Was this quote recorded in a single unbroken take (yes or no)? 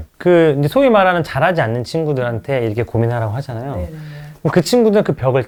yes